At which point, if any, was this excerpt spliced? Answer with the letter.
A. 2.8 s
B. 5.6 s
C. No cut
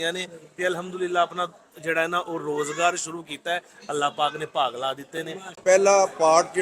B